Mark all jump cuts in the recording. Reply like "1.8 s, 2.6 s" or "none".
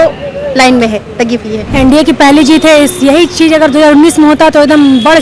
1.6 s